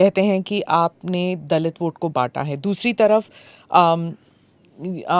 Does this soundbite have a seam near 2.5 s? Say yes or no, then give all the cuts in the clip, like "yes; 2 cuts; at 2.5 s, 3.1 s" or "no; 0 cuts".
no; 0 cuts